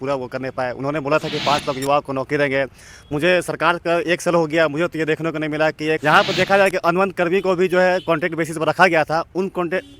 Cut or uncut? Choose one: cut